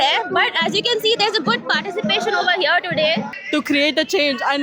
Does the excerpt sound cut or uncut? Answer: cut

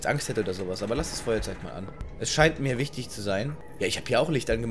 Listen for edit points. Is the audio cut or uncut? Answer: uncut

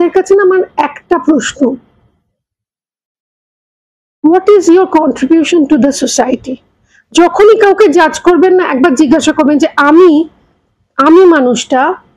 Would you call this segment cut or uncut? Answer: uncut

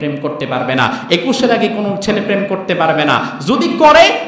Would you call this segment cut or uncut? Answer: uncut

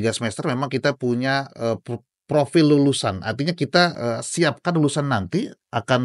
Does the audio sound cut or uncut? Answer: uncut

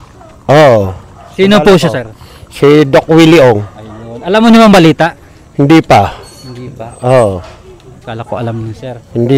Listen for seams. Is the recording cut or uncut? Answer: uncut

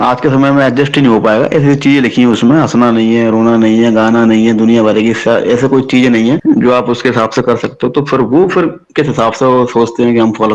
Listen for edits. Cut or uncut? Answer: uncut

